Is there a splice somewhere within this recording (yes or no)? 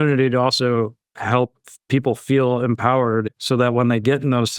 yes